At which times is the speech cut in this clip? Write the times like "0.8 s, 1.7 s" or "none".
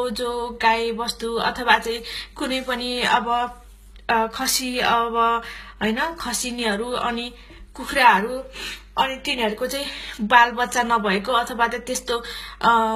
none